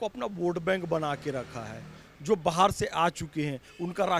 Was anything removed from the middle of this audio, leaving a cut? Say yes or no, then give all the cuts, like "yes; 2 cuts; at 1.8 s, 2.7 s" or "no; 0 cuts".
no; 0 cuts